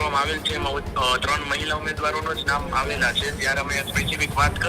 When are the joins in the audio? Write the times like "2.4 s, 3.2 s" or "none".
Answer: none